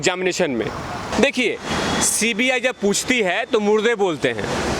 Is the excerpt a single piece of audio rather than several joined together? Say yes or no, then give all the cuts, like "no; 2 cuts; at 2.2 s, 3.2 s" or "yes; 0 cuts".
no; 1 cut; at 1.1 s